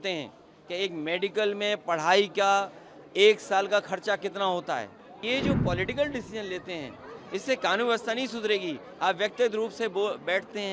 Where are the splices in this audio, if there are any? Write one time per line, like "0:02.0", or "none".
0:05.2